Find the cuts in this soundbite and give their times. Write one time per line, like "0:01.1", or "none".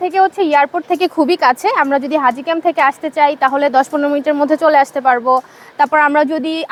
none